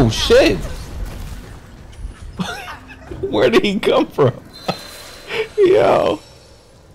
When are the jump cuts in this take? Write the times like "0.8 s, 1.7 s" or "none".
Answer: none